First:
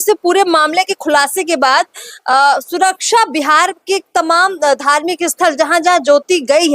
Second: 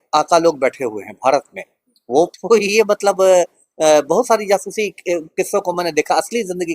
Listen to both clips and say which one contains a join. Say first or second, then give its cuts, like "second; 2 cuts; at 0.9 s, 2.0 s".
second; 1 cut; at 2.4 s